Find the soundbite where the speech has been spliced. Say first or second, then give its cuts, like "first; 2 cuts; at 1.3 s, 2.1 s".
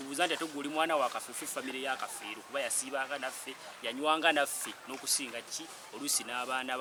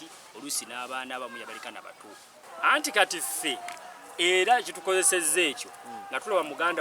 second; 1 cut; at 2.4 s